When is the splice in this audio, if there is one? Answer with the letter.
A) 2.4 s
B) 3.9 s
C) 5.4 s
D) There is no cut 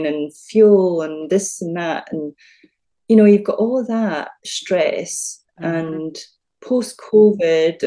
D